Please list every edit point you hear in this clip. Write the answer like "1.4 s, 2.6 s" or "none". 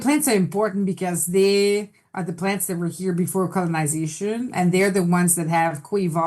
none